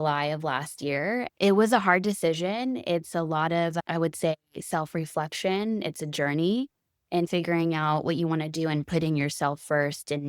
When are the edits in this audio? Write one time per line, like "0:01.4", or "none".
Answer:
0:01.3